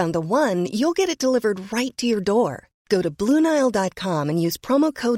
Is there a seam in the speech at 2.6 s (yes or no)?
no